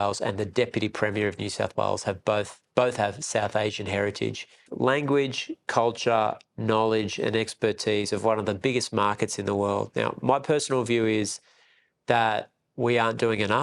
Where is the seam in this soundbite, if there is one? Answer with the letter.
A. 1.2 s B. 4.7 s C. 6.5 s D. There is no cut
B